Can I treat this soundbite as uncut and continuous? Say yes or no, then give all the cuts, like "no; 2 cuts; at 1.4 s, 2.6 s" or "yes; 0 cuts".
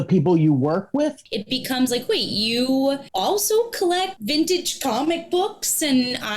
no; 3 cuts; at 1.3 s, 3.1 s, 4.2 s